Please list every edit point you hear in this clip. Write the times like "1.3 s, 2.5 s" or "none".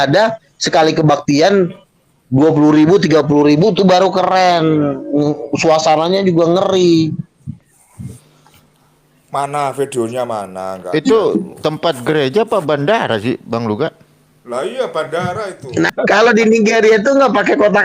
15.9 s